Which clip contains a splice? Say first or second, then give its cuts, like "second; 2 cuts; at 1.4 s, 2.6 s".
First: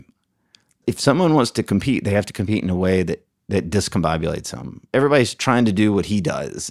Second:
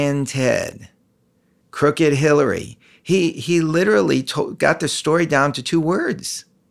first; 3 cuts; at 0.8 s, 3.3 s, 4.9 s